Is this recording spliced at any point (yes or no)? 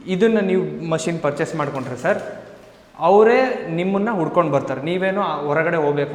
no